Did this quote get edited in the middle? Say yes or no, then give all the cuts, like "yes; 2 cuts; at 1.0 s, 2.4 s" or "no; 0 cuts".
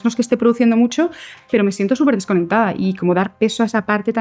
no; 0 cuts